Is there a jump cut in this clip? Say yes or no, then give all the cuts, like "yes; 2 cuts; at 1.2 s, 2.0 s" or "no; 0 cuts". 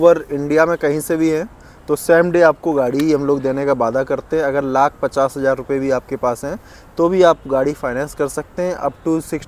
no; 0 cuts